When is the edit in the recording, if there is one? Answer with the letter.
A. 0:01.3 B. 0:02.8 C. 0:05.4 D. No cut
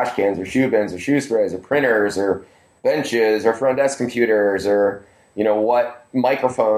D